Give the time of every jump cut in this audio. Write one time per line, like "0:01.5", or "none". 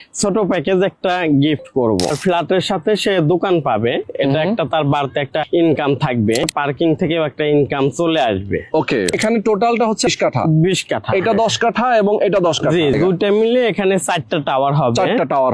0:02.2
0:05.5
0:06.4
0:09.1
0:10.1
0:13.0